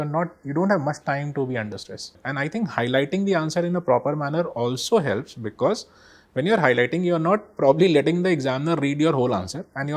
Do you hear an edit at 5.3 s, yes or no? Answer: no